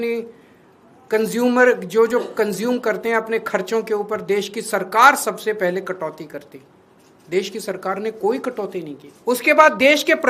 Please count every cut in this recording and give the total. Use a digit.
1